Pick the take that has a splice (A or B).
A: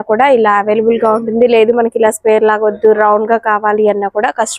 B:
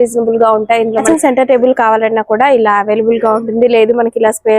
B